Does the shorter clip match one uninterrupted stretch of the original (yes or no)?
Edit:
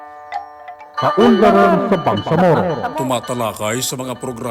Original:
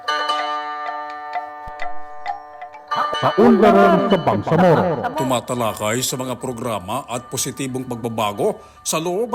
no